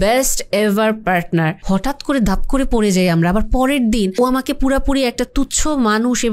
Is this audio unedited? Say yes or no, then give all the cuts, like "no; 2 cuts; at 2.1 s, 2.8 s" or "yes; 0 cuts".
no; 2 cuts; at 1.6 s, 4.1 s